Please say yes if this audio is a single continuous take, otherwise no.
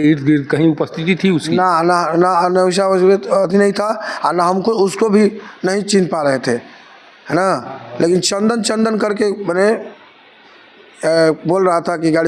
yes